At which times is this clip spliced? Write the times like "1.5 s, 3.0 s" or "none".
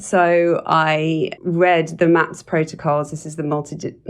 1.3 s